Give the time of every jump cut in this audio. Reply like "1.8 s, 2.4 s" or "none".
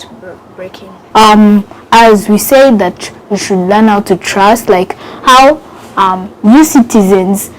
1.0 s